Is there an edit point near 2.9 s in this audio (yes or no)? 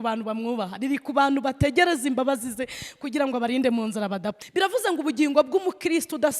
no